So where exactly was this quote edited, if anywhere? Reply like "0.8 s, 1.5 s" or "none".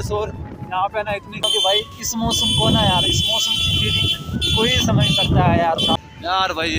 1.4 s, 5.9 s